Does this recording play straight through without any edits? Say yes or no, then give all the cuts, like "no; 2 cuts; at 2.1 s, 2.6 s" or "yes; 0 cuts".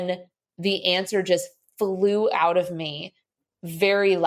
yes; 0 cuts